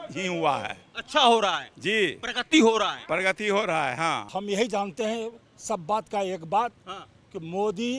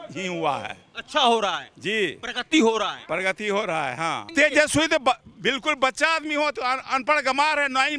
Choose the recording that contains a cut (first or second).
first